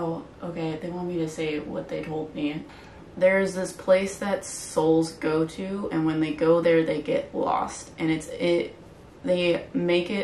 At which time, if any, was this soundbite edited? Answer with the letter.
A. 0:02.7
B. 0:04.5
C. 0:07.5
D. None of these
A